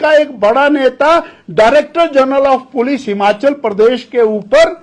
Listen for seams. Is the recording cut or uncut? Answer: uncut